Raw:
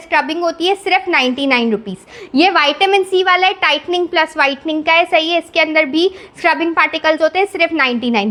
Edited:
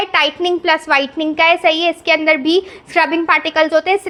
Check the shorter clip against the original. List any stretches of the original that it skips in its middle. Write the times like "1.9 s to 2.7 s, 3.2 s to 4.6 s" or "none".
none